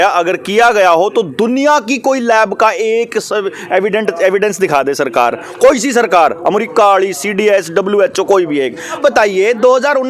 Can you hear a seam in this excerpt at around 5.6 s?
no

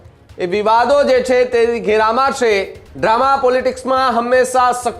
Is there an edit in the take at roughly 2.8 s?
yes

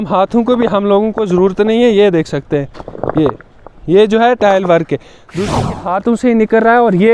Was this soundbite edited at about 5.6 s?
yes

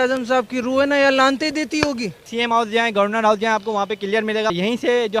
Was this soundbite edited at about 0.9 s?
no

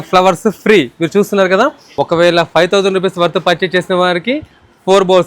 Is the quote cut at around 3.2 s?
no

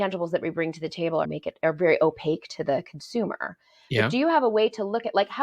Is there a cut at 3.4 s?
no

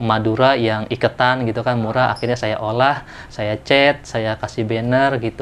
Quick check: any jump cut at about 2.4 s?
no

